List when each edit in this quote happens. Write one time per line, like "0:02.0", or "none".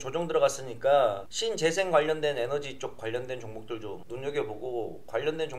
none